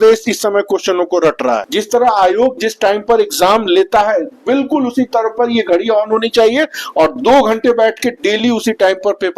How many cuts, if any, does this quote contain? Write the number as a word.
one